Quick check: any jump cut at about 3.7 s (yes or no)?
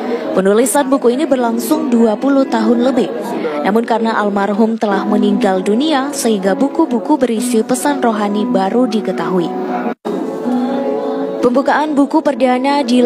no